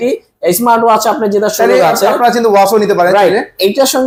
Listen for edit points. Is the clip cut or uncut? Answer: uncut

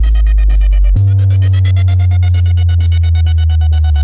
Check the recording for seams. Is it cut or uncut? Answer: uncut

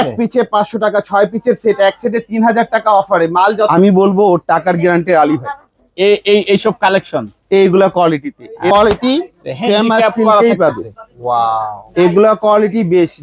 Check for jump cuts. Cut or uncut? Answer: cut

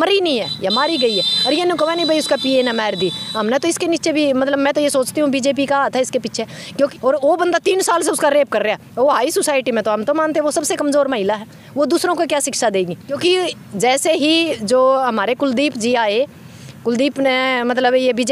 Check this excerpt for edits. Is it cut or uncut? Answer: cut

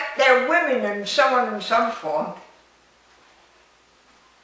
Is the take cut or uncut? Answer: uncut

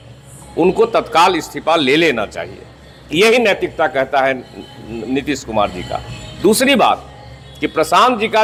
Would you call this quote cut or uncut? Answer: uncut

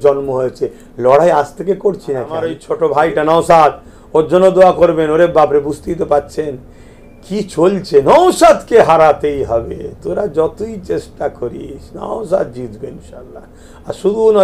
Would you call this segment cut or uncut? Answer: cut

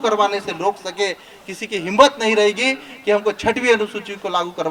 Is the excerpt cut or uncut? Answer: uncut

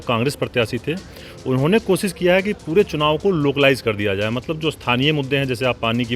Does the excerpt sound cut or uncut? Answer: uncut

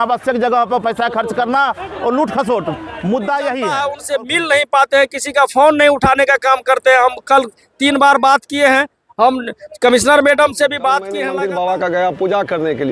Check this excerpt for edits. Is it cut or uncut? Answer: cut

